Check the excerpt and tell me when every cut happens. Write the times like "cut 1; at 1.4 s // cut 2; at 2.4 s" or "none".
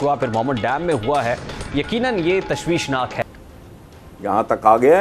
cut 1; at 3.2 s

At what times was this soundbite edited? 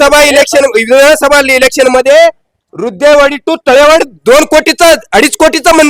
none

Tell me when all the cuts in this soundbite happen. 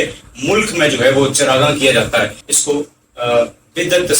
cut 1; at 2.5 s

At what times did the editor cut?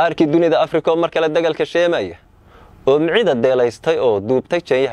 none

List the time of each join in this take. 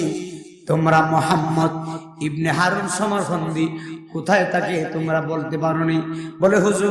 none

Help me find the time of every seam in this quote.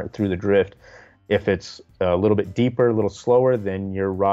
cut 1; at 1.2 s

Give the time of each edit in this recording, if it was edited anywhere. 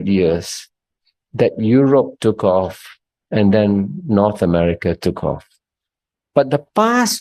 none

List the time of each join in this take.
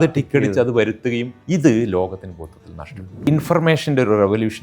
cut 1; at 1.3 s // cut 2; at 3.3 s

